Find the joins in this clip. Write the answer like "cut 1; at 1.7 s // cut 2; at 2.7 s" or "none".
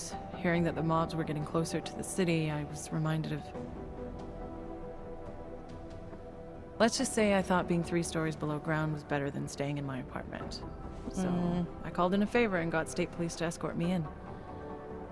cut 1; at 4.8 s